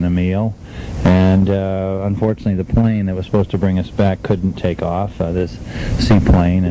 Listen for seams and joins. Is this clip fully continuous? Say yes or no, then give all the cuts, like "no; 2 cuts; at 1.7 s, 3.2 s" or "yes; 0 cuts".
no; 1 cut; at 1.9 s